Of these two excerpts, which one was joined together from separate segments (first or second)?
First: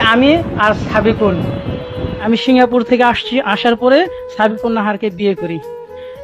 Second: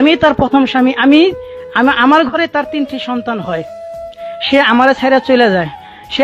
first